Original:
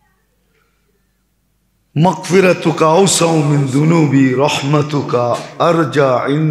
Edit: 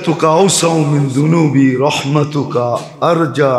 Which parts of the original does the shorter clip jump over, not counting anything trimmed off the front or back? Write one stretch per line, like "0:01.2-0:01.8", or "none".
none